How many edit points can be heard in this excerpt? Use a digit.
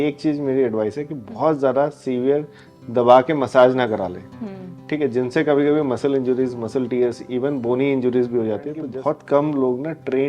1